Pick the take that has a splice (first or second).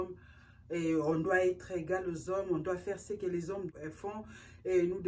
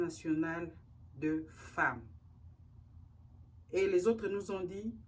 first